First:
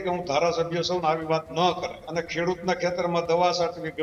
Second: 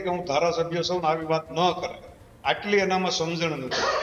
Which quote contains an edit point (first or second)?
first